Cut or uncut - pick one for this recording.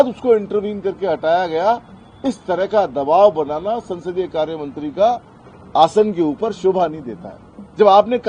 uncut